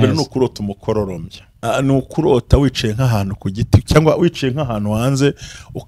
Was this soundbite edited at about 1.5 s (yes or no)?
yes